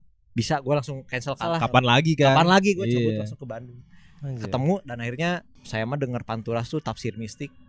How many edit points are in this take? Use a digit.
2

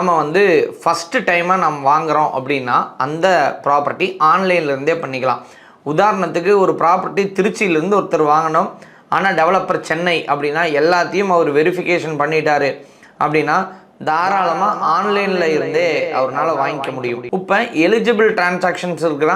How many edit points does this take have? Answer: 1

